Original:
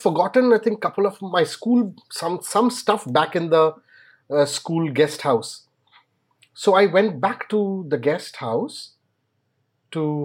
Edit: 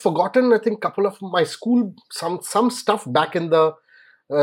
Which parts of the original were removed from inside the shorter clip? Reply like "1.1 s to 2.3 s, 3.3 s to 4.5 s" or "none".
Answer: none

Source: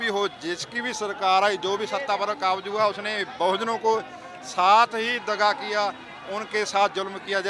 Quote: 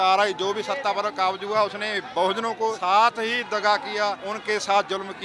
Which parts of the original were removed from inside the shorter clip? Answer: 4.0 s to 4.5 s, 6.0 s to 6.3 s

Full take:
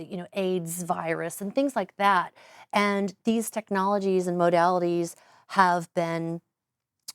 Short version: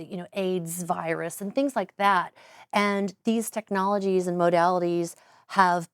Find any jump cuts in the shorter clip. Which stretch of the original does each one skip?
none

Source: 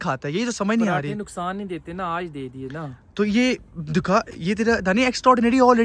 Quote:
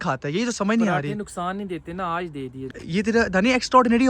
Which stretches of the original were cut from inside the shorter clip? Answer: 2.8 s to 4.3 s

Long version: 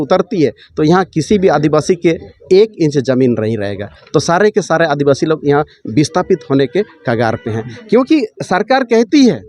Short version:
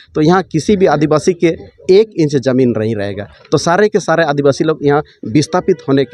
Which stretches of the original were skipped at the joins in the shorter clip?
none

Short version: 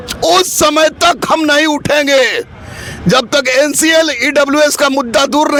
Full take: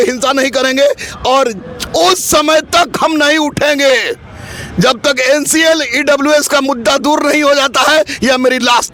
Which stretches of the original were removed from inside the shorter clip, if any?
none

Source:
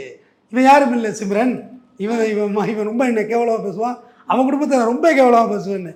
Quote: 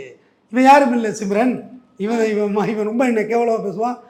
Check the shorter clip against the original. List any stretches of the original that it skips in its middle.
none

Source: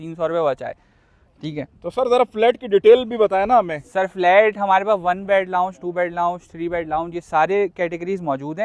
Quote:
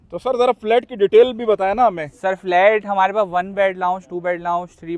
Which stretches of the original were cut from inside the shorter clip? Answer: none

